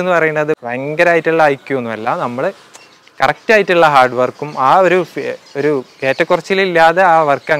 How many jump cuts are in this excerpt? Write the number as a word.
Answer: zero